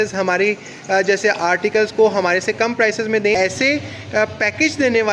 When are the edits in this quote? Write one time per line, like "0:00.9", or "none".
0:03.3